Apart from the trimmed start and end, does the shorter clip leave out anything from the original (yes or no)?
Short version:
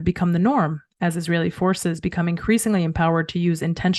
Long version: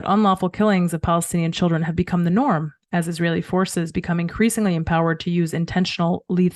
no